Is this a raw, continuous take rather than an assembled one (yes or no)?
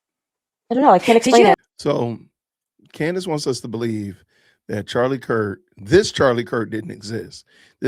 no